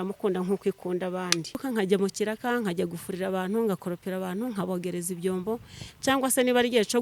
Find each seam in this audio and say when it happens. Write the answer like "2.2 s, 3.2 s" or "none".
1.6 s